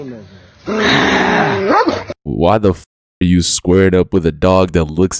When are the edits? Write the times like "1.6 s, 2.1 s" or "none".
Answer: 2.1 s